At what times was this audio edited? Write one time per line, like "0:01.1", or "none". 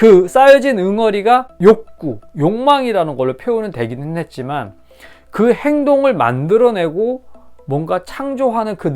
0:01.5